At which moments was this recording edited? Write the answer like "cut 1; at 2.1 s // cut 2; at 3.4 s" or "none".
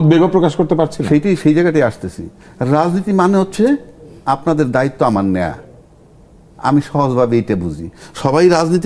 none